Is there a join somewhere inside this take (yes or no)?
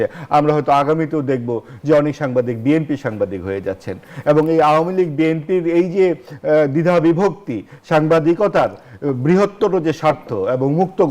no